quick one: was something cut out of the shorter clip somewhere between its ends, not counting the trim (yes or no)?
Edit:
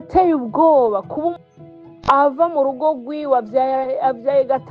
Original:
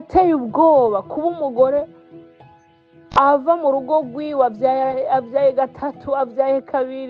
yes